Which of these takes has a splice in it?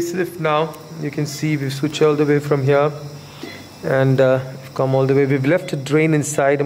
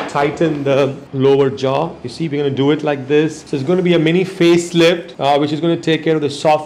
second; 3 cuts; at 1.0 s, 3.5 s, 5.1 s

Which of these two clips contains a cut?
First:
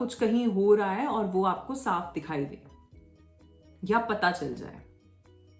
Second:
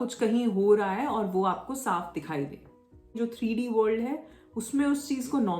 second; 1 cut; at 3.2 s

